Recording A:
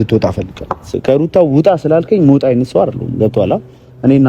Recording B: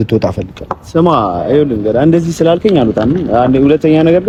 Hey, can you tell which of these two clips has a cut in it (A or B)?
A